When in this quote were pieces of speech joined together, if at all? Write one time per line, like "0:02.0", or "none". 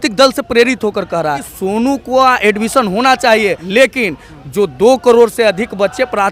0:01.5
0:03.6